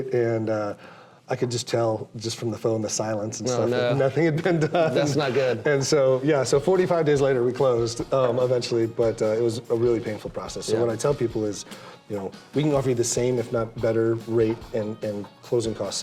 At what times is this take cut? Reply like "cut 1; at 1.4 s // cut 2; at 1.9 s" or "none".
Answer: none